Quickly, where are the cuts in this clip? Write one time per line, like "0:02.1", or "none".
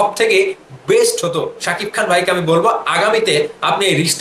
none